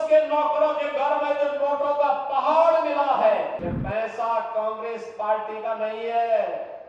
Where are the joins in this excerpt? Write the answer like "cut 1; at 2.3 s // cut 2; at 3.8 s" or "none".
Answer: cut 1; at 3.7 s

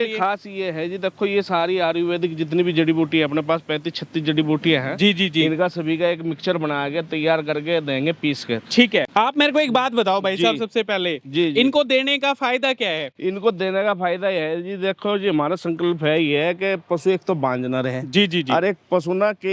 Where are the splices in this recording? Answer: none

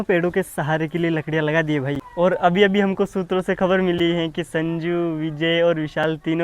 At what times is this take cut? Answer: cut 1; at 2.0 s

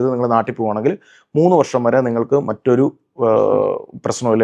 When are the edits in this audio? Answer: none

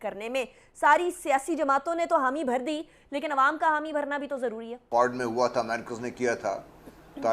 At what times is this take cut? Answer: cut 1; at 4.9 s

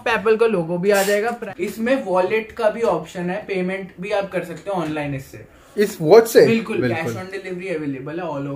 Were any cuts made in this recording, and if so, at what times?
cut 1; at 1.4 s // cut 2; at 6.8 s

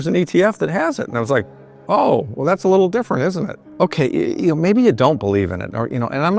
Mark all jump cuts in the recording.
cut 1; at 1.7 s // cut 2; at 3.7 s

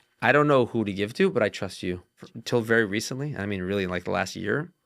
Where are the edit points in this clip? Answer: cut 1; at 2.2 s

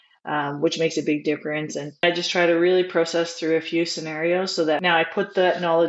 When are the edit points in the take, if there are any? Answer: cut 1; at 2.0 s // cut 2; at 4.8 s

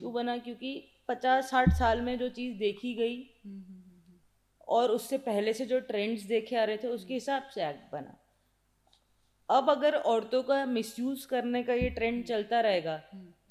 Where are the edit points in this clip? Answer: none

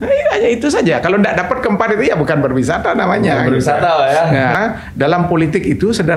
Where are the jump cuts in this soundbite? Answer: cut 1; at 4.6 s

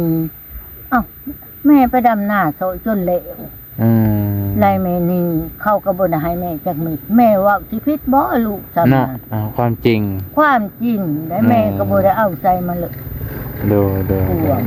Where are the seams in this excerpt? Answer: none

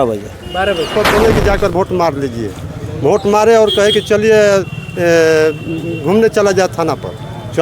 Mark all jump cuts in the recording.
cut 1; at 0.9 s

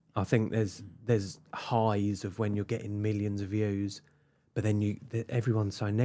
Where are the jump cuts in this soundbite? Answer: none

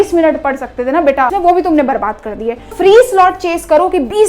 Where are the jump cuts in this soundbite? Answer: cut 1; at 1.3 s // cut 2; at 2.7 s

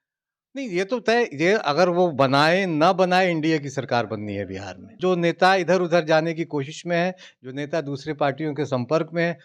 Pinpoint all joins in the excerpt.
cut 1; at 4.9 s

